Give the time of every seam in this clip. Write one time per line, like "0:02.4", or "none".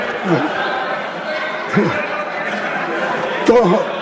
none